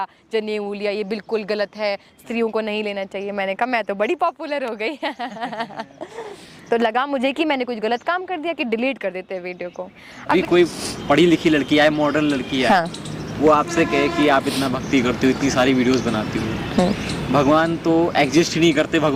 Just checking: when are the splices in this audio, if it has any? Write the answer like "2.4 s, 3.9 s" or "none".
none